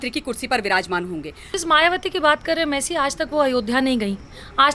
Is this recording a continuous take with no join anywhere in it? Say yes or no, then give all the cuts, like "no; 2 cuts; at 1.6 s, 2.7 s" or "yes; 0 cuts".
no; 1 cut; at 1.5 s